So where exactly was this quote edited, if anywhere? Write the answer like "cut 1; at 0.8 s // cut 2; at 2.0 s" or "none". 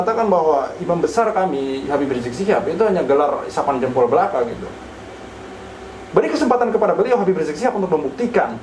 none